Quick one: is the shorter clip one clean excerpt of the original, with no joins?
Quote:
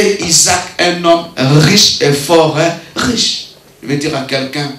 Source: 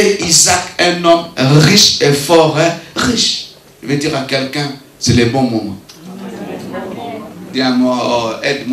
yes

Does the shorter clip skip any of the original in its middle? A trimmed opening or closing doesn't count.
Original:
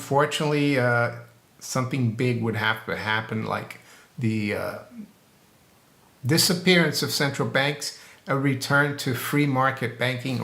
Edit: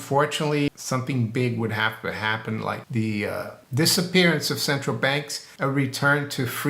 yes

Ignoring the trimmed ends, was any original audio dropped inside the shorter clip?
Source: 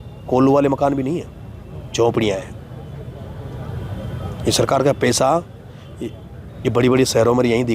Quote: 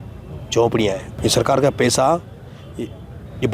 yes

